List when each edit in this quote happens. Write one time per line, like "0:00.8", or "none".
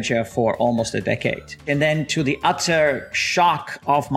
0:01.6